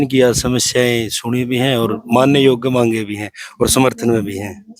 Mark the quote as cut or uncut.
uncut